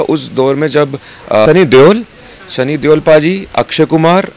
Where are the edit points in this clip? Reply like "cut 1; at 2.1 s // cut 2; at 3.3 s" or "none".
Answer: cut 1; at 1.5 s